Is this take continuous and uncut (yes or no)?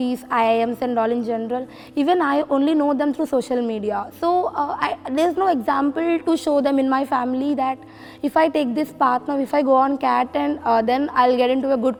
yes